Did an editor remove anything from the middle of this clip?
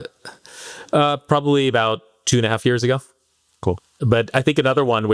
yes; 1 cut; at 4.0 s

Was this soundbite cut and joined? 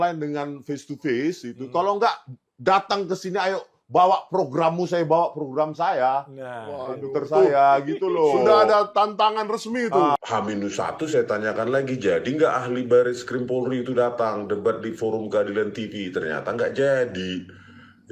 yes; 1 cut; at 10.2 s

